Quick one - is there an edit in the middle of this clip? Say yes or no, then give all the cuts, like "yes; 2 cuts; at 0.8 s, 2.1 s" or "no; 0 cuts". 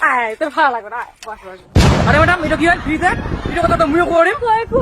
yes; 1 cut; at 2.1 s